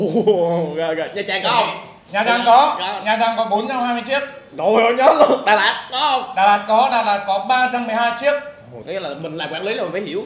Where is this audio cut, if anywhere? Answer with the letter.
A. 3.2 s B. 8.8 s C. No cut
B